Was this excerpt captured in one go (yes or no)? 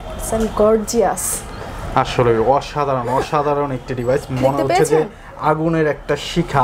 yes